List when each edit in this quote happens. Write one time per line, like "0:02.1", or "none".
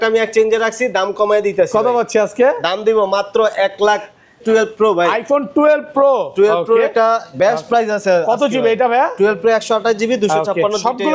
0:04.4